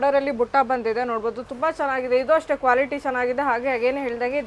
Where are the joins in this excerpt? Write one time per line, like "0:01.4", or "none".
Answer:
none